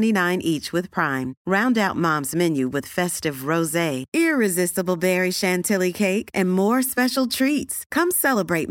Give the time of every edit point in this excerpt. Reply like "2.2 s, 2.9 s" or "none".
none